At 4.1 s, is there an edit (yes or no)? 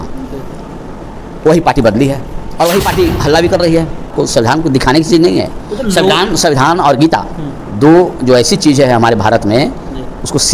yes